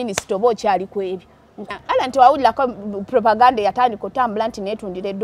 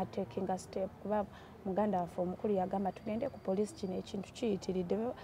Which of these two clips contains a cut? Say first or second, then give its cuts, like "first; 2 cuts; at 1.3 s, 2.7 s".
first; 1 cut; at 1.7 s